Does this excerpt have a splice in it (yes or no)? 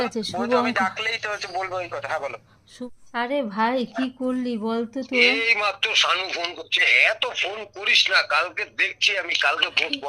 yes